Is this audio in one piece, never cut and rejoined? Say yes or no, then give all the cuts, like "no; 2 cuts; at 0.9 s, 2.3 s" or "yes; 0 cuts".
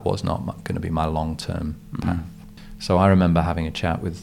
no; 1 cut; at 2.5 s